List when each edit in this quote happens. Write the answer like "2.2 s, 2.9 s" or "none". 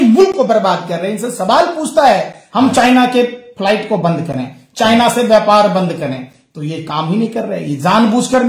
2.4 s